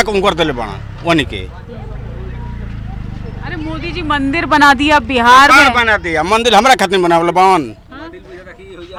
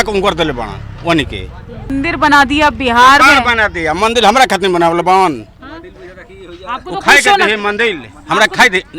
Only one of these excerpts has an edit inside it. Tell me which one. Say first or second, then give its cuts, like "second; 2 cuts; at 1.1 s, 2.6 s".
second; 1 cut; at 1.9 s